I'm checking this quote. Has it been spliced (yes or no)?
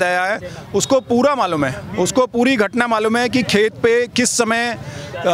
no